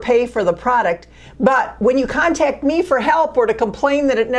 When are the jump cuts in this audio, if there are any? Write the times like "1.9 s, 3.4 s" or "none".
none